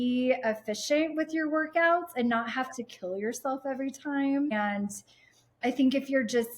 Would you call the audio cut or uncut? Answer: uncut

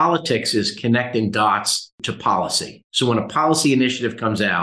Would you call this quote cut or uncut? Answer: cut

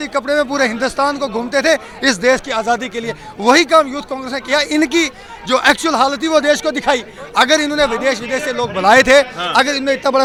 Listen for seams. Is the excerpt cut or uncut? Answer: uncut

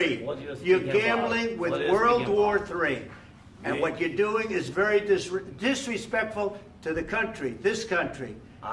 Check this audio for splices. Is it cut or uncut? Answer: uncut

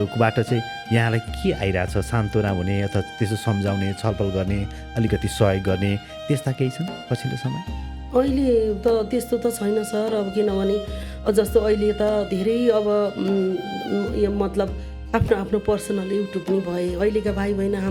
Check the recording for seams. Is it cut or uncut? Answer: uncut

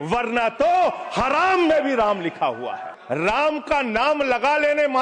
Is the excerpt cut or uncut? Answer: cut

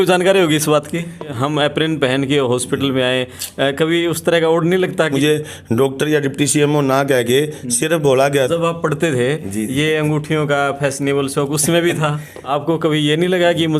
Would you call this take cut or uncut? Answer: cut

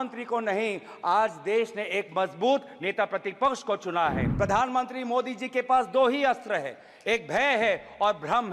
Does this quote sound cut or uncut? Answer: cut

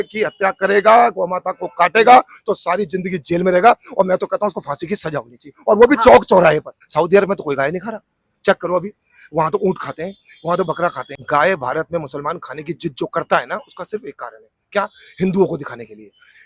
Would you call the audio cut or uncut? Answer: cut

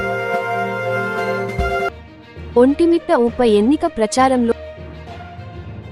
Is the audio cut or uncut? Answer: cut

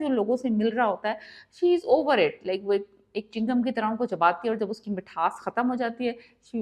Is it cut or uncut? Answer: uncut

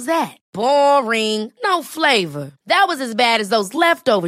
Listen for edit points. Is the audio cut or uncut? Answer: uncut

